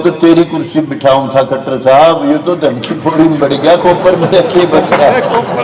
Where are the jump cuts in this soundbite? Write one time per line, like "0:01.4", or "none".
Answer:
none